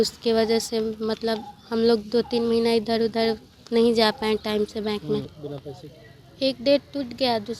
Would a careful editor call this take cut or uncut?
cut